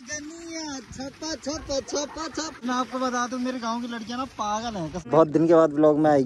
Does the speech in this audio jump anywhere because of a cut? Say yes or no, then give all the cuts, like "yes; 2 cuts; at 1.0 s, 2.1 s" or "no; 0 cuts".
yes; 2 cuts; at 2.6 s, 4.9 s